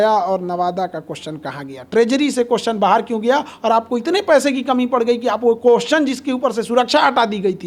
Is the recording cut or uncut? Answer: uncut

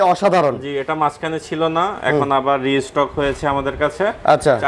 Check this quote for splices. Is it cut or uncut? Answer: uncut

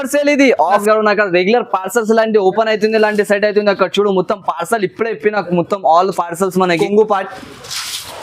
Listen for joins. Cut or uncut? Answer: cut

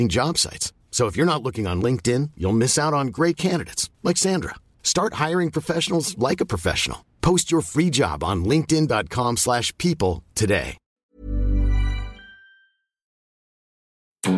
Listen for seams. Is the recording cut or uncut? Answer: uncut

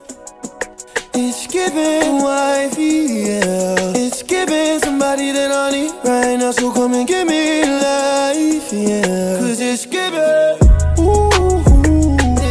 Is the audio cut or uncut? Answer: uncut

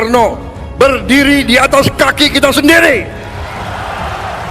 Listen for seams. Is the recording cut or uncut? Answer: uncut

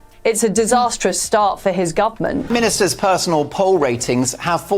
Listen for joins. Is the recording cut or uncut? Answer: cut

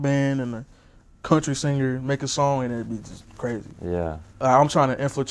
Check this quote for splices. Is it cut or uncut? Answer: cut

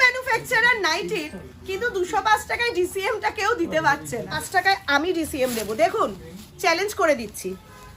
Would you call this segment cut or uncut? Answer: cut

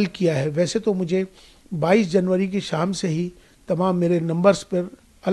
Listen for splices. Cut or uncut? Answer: uncut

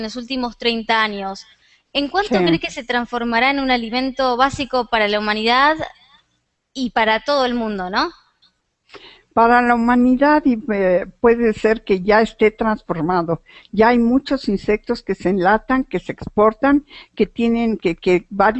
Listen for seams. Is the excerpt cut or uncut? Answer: uncut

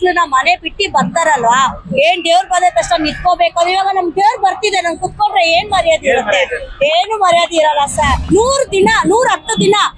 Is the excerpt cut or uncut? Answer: cut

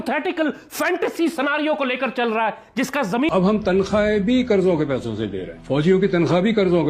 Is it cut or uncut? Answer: cut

